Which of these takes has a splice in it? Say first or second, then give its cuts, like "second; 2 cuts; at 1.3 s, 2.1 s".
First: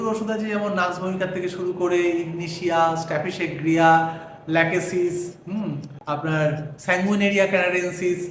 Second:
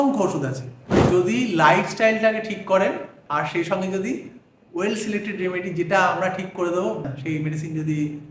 second; 3 cuts; at 1.0 s, 3.2 s, 7.2 s